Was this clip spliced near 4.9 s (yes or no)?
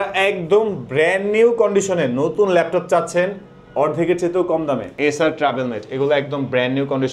yes